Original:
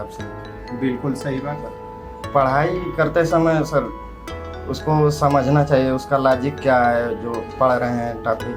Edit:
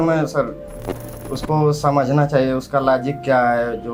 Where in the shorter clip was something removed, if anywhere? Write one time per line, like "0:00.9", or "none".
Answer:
none